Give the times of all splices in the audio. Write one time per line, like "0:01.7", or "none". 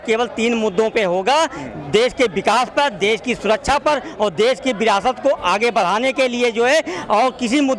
none